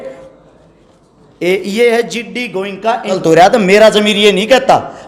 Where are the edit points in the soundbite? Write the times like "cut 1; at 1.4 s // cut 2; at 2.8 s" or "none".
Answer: cut 1; at 3.2 s